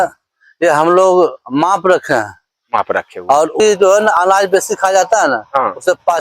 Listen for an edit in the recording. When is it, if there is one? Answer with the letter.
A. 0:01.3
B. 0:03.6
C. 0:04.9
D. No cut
B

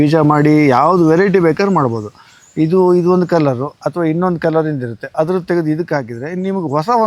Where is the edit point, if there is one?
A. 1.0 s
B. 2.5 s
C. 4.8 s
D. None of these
D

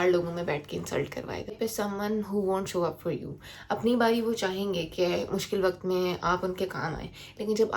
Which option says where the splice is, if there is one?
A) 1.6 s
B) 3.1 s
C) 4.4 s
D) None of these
A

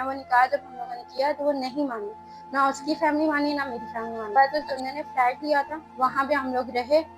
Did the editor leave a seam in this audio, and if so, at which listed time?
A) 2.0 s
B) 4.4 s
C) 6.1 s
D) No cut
B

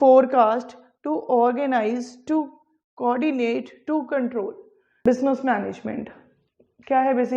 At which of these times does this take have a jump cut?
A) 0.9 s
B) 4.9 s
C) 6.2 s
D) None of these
B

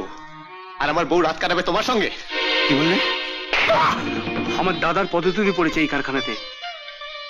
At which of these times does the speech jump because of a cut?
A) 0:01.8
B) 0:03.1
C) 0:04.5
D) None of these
C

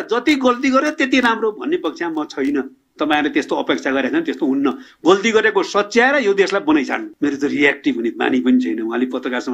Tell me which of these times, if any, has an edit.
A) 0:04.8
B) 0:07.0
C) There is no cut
B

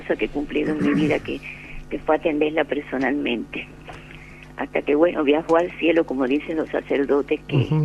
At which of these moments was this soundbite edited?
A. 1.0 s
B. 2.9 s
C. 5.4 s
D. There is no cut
C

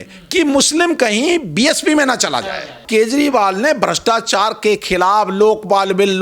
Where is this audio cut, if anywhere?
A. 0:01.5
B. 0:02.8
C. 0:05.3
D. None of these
B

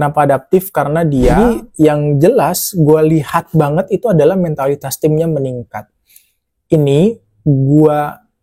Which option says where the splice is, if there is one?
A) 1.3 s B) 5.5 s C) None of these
A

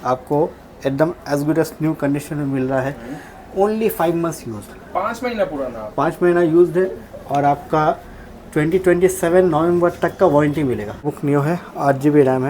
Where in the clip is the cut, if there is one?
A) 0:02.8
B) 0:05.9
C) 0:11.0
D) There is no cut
C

